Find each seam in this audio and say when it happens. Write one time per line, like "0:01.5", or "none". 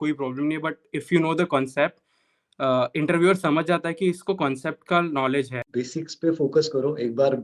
0:05.6